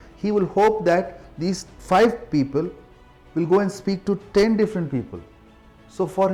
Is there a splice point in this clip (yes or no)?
no